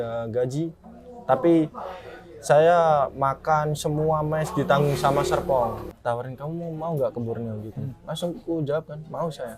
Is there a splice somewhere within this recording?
yes; 1 cut; at 5.8 s

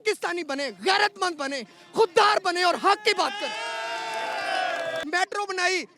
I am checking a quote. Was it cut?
yes; 1 cut; at 5.0 s

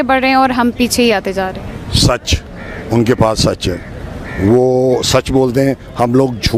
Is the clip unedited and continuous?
yes; 0 cuts

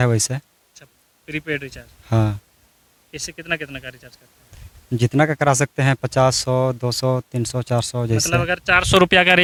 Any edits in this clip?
no; 0 cuts

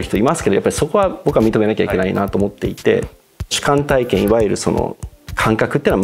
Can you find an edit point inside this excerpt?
yes; 1 cut; at 3.5 s

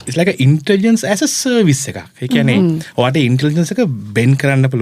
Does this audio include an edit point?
no; 0 cuts

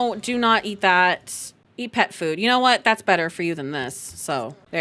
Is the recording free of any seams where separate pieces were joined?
yes; 0 cuts

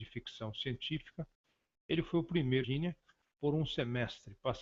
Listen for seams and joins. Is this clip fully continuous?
yes; 0 cuts

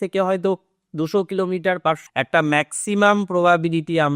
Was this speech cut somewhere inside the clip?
yes; 1 cut; at 2.0 s

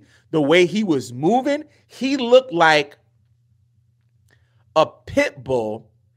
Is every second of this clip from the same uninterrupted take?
yes; 0 cuts

